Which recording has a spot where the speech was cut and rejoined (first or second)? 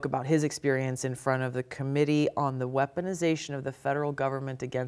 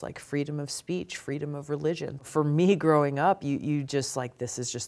second